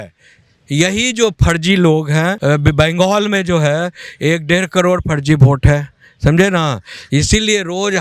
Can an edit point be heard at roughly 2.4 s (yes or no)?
yes